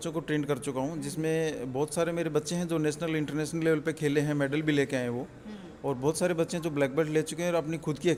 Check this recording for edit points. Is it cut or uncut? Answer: uncut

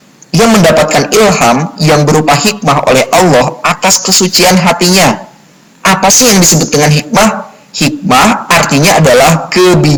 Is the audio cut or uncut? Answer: uncut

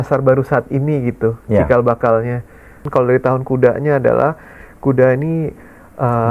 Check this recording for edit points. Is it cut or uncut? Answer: cut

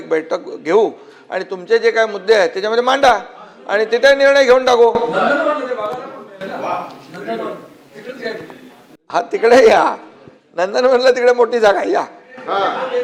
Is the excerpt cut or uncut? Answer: uncut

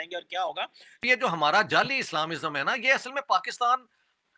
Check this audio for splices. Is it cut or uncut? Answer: cut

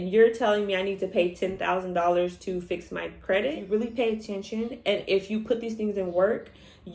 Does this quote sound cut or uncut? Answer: cut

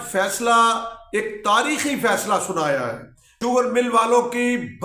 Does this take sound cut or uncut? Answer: cut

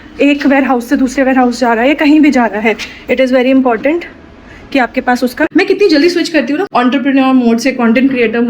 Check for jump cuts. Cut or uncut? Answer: cut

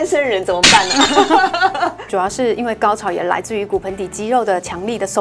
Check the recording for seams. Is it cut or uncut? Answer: cut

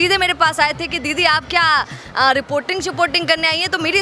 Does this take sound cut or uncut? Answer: uncut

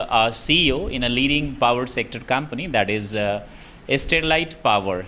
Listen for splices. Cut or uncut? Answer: uncut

